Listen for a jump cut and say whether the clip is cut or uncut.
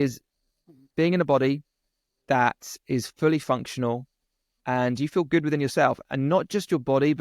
uncut